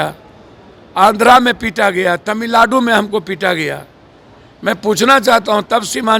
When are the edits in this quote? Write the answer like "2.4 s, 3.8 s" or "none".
none